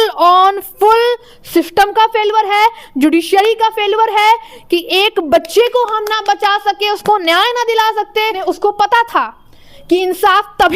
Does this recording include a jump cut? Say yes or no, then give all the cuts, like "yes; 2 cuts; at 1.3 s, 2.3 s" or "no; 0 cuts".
yes; 1 cut; at 8.4 s